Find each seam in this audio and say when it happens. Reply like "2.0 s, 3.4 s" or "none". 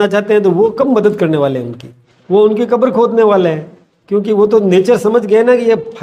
none